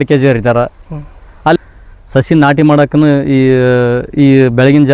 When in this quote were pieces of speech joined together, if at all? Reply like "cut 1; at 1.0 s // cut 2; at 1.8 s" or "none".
cut 1; at 1.6 s